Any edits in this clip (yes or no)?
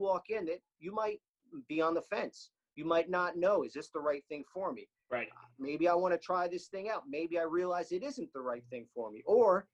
no